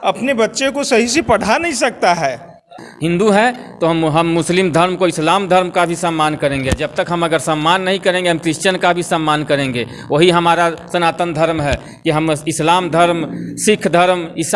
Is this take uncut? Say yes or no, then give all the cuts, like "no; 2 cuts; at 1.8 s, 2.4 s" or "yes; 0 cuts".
no; 1 cut; at 2.7 s